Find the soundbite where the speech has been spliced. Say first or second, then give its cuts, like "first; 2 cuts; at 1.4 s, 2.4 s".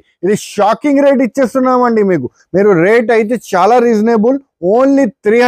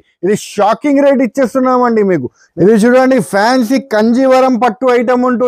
second; 1 cut; at 2.4 s